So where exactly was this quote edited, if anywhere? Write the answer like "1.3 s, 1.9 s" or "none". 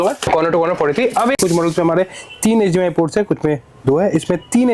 1.4 s